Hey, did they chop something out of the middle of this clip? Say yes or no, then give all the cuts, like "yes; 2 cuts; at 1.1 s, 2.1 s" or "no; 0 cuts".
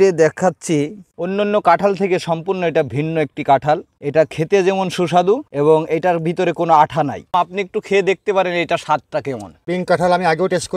yes; 2 cuts; at 7.3 s, 9.6 s